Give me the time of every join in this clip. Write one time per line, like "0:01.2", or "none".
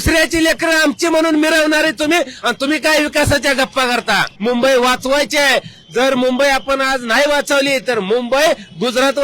0:04.3